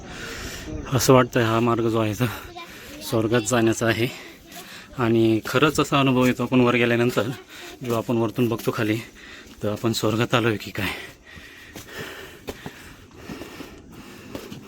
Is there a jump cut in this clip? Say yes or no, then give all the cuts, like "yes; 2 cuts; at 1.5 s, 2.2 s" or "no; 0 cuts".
no; 0 cuts